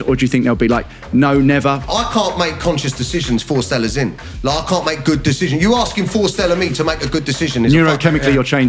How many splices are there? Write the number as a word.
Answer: one